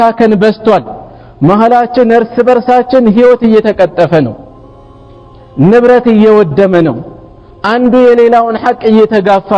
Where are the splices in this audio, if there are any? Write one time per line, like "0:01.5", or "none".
none